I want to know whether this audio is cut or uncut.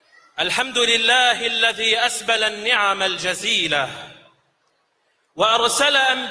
cut